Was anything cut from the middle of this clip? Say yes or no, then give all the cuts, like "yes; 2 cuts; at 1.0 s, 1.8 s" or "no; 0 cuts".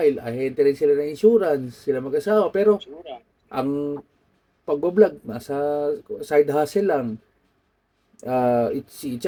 no; 0 cuts